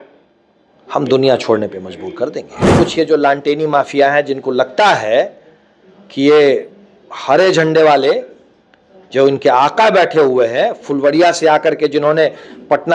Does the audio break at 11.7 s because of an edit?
no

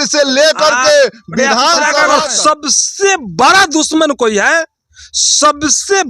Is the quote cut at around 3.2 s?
no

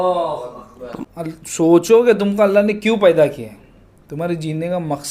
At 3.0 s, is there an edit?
no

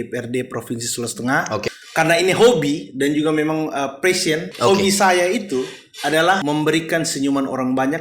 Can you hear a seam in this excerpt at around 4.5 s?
yes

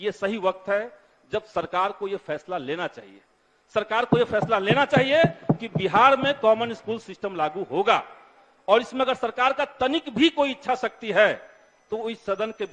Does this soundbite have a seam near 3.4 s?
no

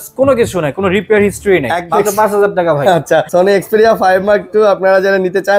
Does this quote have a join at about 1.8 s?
yes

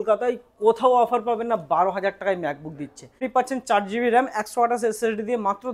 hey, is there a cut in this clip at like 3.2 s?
yes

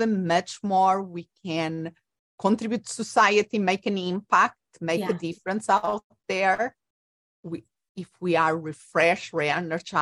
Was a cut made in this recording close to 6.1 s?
no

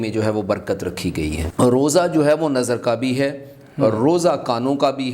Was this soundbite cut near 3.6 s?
no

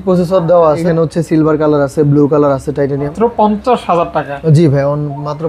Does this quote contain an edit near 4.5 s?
no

